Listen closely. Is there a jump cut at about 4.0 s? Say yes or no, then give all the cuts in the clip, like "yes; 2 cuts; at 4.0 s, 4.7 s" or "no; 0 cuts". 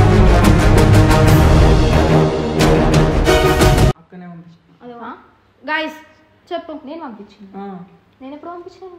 yes; 1 cut; at 4.0 s